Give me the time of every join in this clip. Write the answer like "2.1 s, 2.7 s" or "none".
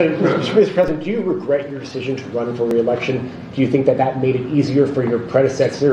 none